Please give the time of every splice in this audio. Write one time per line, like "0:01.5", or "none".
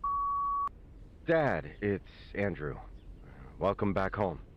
0:00.9
0:03.3